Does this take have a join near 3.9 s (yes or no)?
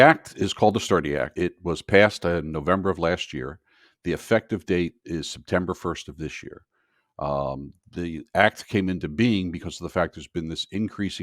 no